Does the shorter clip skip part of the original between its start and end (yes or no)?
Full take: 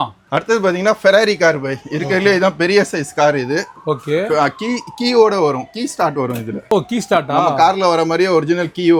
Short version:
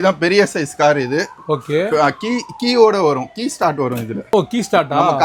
no